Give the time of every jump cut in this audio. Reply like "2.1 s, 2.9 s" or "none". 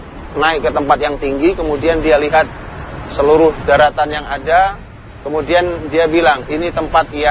none